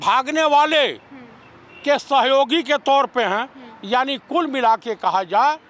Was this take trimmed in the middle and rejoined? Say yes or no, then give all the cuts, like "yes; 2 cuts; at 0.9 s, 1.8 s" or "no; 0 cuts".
no; 0 cuts